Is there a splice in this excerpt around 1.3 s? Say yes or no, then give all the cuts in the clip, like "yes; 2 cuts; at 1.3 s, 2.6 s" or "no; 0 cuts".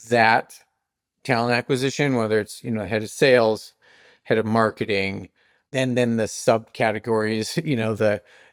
no; 0 cuts